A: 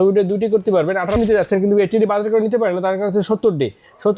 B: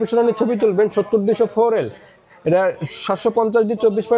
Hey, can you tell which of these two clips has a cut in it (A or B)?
A